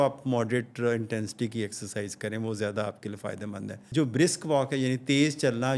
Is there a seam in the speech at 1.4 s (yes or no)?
no